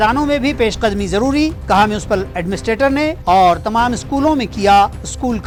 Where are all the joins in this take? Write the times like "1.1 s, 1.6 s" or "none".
none